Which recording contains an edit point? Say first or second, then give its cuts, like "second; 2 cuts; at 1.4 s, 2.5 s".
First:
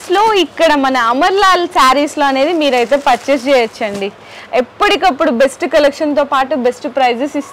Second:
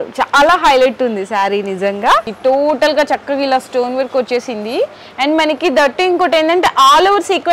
second; 1 cut; at 2.3 s